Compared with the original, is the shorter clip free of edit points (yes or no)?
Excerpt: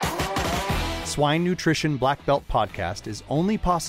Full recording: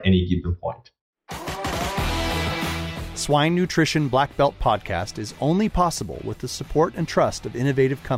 no